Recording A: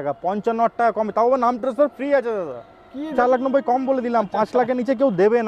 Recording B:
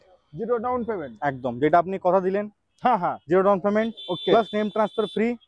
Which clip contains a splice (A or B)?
A